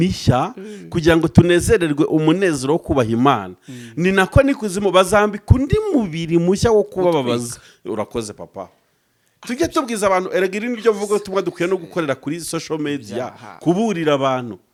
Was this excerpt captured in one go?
yes; 0 cuts

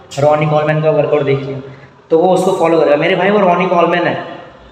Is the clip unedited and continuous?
yes; 0 cuts

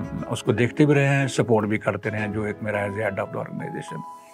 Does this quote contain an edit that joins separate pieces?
no; 0 cuts

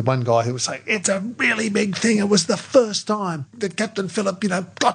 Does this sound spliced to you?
yes; 2 cuts; at 1.0 s, 3.5 s

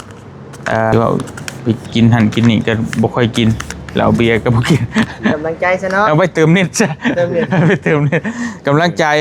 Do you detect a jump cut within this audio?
yes; 1 cut; at 0.9 s

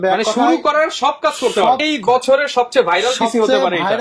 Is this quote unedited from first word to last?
no; 1 cut; at 1.8 s

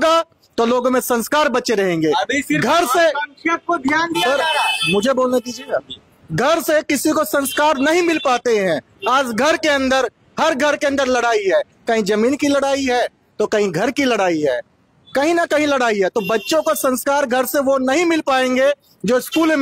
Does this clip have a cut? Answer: no; 0 cuts

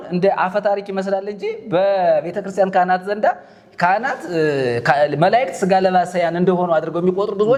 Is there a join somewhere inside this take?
no; 0 cuts

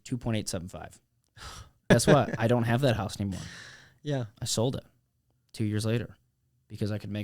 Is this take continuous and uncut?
no; 1 cut; at 1.8 s

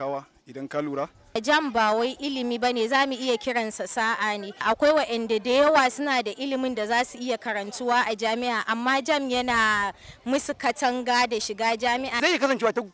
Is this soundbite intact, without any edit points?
no; 3 cuts; at 1.4 s, 4.6 s, 12.2 s

